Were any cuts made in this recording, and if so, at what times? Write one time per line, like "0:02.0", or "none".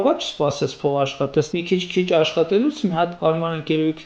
0:01.6
0:03.1